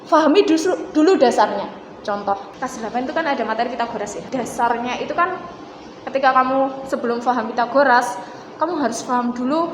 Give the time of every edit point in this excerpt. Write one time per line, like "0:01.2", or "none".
0:02.5
0:04.2

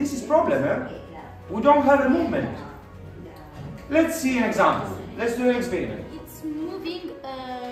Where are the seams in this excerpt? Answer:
0:06.2

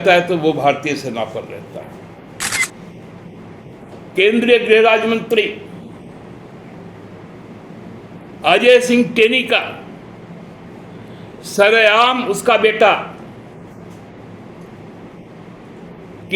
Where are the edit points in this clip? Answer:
0:02.7

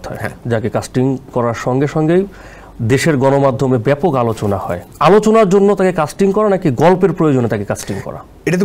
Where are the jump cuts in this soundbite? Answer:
none

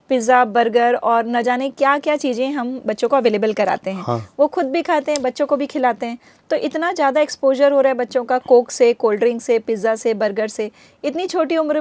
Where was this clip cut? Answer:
none

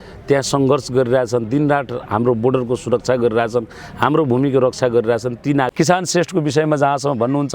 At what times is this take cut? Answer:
0:05.7

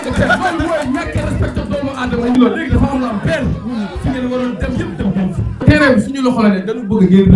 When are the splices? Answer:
0:02.4
0:05.6

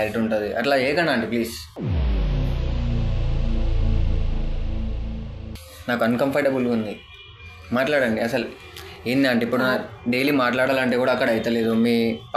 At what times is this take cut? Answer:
none

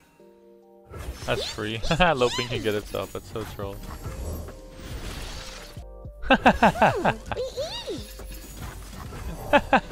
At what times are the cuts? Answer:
0:05.8

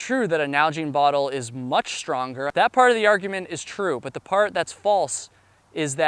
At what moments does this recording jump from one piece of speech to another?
0:02.5

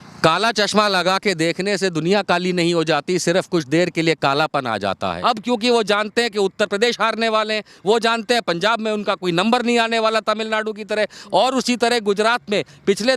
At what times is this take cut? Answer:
0:05.1

